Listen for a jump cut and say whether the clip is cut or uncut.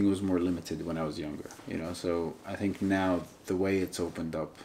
cut